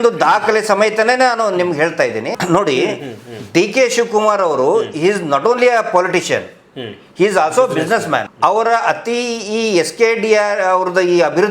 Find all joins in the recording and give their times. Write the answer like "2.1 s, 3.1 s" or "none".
2.4 s, 8.3 s